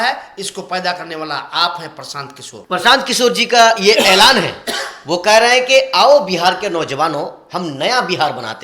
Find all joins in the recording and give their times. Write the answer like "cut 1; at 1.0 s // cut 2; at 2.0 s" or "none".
cut 1; at 2.5 s